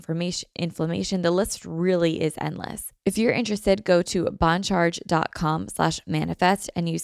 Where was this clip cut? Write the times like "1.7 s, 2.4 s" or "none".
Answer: 2.8 s